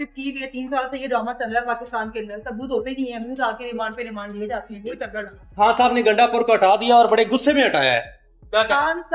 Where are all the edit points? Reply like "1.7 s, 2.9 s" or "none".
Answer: none